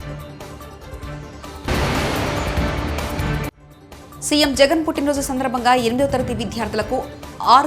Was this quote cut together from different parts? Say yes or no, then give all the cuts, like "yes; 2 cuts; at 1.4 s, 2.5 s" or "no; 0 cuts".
yes; 2 cuts; at 1.7 s, 3.7 s